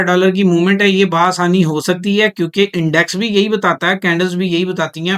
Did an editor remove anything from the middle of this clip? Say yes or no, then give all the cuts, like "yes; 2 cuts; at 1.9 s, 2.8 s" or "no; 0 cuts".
no; 0 cuts